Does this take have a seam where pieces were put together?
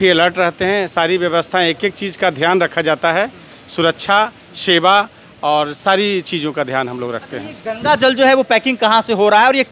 no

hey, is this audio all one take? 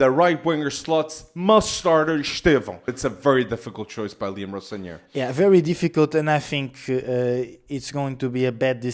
no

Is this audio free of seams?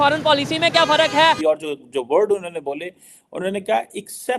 no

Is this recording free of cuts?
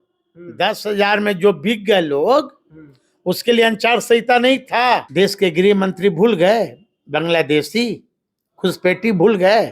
no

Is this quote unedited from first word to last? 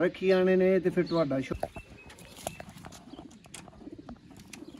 no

